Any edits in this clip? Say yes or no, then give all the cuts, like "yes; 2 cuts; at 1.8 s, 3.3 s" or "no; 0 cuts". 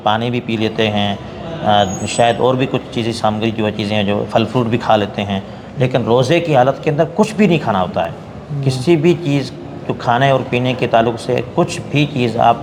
no; 0 cuts